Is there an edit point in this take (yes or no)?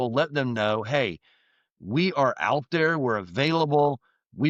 no